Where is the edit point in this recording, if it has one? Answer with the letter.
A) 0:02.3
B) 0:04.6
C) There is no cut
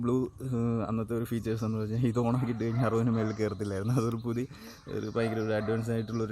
C